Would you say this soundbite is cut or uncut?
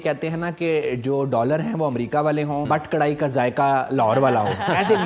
cut